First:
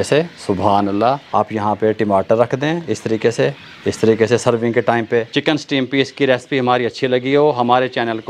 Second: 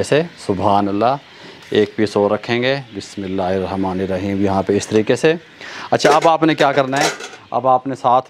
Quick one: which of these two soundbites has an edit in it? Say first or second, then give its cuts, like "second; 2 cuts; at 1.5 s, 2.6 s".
first; 3 cuts; at 1.2 s, 3.7 s, 5.3 s